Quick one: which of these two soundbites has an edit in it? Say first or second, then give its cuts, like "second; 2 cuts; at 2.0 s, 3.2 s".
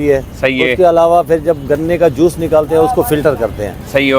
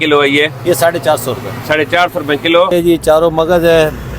second; 1 cut; at 2.7 s